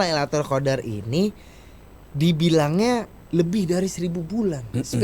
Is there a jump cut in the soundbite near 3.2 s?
yes; 1 cut; at 3.2 s

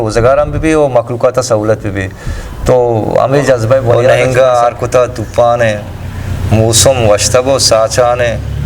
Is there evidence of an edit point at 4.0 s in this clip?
yes; 1 cut; at 4.0 s

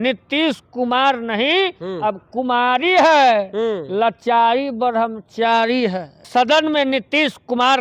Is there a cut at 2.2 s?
no; 1 cut; at 6.2 s

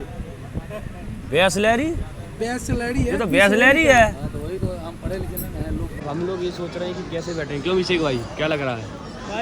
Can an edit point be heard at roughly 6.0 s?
yes; 1 cut; at 6.0 s

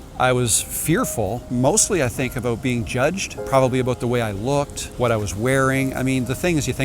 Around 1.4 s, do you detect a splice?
yes; 3 cuts; at 1.4 s, 3.3 s, 4.8 s

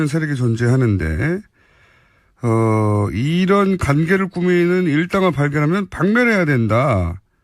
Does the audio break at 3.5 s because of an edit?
yes; 1 cut; at 3.5 s

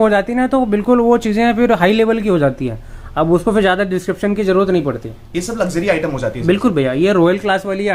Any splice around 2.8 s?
no; 0 cuts

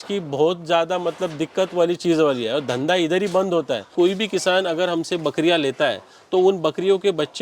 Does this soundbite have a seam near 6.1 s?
no; 1 cut; at 3.9 s

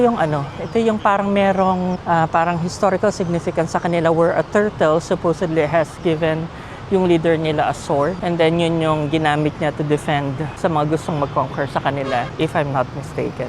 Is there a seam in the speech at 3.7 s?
no; 4 cuts; at 2.0 s, 8.2 s, 10.5 s, 12.3 s

